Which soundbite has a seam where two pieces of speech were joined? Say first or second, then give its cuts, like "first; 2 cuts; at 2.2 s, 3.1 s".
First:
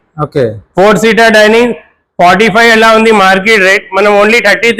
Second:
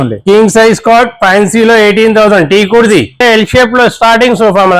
second; 1 cut; at 3.2 s